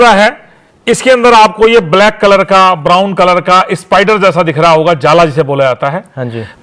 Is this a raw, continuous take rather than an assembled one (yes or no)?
yes